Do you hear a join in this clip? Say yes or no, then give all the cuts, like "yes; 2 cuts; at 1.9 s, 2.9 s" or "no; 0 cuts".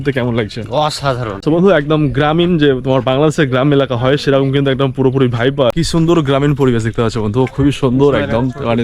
yes; 2 cuts; at 1.4 s, 5.7 s